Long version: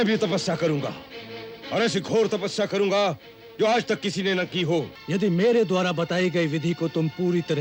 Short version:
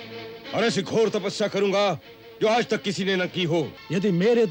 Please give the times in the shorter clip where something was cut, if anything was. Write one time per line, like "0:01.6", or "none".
none